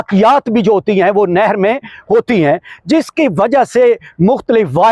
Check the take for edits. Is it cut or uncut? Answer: uncut